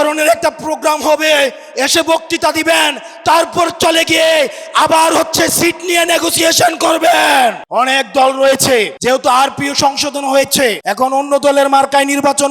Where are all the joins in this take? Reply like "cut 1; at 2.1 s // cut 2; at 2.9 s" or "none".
cut 1; at 7.6 s // cut 2; at 8.9 s // cut 3; at 10.8 s